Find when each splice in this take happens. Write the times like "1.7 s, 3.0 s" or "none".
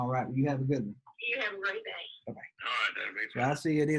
1.1 s, 2.5 s